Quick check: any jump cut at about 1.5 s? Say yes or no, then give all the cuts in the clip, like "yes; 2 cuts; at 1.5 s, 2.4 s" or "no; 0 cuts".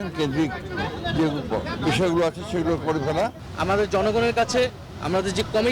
no; 1 cut; at 3.5 s